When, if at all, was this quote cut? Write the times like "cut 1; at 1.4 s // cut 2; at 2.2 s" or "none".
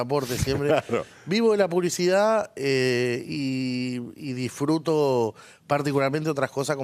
cut 1; at 1.2 s